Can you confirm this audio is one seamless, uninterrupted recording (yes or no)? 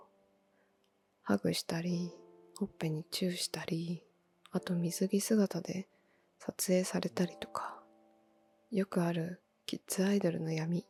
yes